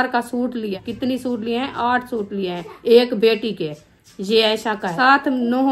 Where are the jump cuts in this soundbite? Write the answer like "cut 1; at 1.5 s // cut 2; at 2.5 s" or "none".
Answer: cut 1; at 0.8 s // cut 2; at 2.7 s // cut 3; at 4.9 s